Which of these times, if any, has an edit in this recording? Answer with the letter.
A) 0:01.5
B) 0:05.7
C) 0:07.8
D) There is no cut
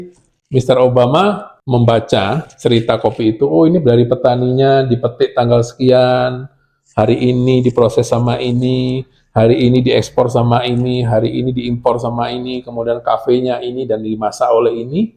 A